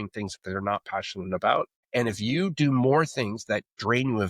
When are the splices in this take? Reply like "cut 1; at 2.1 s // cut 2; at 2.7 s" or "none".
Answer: cut 1; at 1.8 s

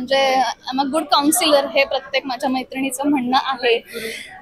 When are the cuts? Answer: none

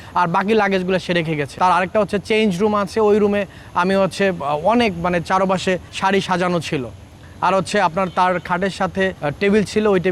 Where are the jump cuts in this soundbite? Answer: cut 1; at 1.5 s // cut 2; at 5.9 s // cut 3; at 9.2 s

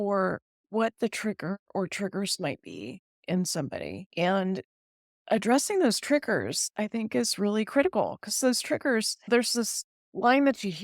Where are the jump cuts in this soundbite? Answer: cut 1; at 4.0 s

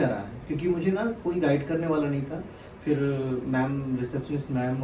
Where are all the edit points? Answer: none

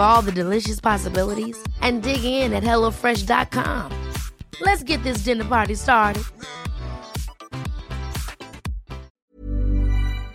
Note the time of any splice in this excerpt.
cut 1; at 9.3 s

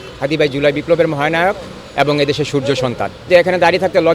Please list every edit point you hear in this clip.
cut 1; at 3.2 s

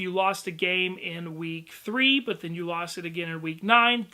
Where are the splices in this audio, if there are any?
cut 1; at 2.9 s

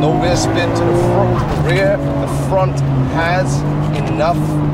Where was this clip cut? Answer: none

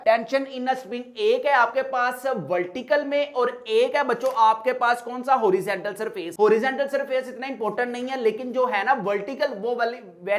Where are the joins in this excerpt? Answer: none

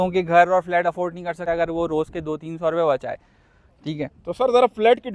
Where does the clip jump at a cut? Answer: cut 1; at 1.4 s

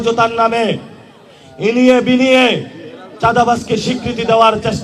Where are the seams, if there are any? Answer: none

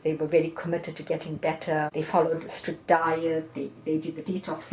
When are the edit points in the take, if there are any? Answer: cut 1; at 1.9 s

